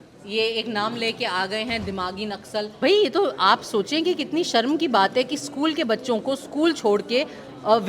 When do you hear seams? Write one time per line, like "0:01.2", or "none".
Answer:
0:02.7